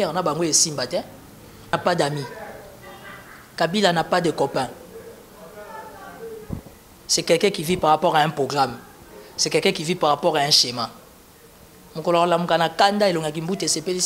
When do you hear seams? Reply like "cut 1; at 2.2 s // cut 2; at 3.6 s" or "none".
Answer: cut 1; at 1.7 s